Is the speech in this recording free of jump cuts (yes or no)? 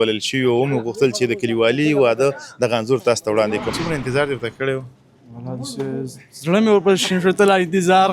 no